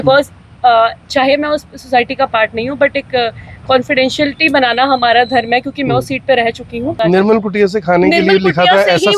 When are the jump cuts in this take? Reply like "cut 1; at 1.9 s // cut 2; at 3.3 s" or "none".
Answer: cut 1; at 7.0 s